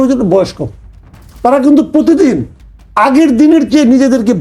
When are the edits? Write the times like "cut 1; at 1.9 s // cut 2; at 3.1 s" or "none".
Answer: cut 1; at 1.2 s